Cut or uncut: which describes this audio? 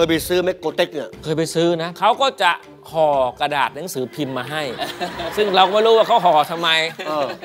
cut